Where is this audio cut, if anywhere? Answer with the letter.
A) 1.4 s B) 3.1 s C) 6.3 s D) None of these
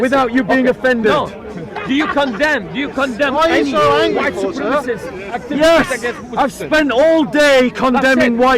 D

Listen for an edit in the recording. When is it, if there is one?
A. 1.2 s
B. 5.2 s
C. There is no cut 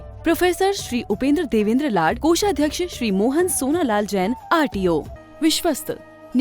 B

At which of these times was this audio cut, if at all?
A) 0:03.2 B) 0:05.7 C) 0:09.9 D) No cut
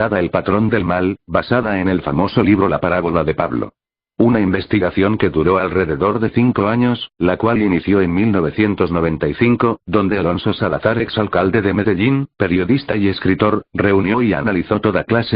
B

